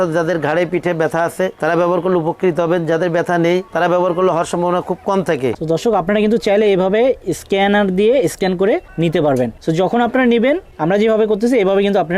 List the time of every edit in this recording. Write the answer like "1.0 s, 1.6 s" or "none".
5.6 s, 8.9 s, 9.6 s, 10.7 s